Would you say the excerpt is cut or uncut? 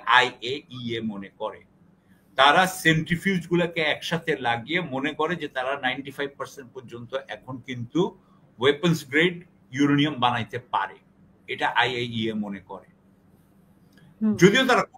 uncut